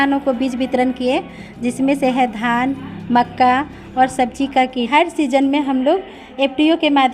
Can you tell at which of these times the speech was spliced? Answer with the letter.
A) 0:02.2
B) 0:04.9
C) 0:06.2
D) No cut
B